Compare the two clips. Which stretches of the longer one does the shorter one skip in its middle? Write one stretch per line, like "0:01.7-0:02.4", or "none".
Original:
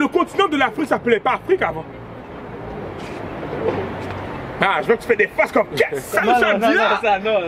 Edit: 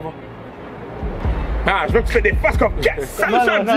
0:02.9-0:04.2

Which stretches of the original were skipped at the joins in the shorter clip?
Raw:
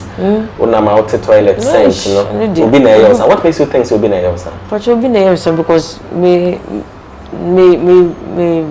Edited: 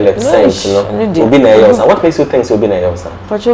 none

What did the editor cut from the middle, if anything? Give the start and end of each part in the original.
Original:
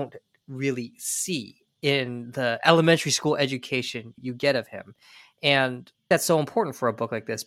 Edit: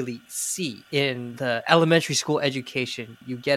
0:01.8-0:02.1

